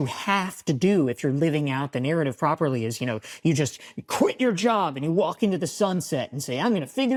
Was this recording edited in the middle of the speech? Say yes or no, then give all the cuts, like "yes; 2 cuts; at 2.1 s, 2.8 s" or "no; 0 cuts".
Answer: no; 0 cuts